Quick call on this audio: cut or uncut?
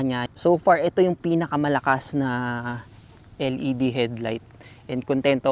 uncut